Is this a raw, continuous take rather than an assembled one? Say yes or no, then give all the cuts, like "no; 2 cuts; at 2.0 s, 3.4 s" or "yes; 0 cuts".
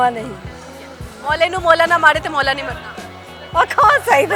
yes; 0 cuts